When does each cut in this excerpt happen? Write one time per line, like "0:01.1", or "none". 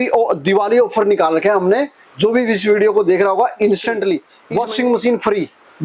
0:04.3

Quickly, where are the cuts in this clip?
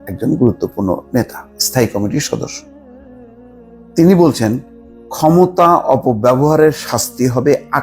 none

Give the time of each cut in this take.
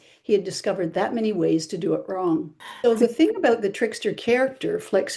0:02.6

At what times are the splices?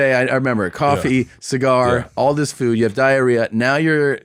none

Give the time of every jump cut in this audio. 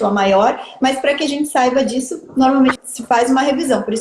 0:02.8

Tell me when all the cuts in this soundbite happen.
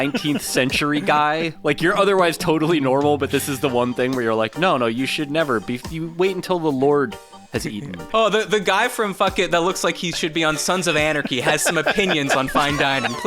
0:08.1

